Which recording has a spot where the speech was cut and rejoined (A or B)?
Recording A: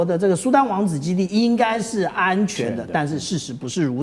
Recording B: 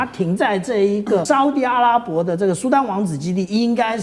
B